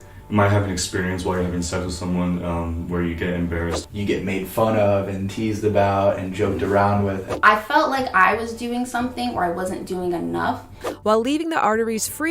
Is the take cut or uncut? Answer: cut